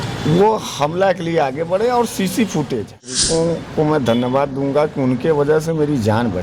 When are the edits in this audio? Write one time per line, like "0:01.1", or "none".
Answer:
0:03.2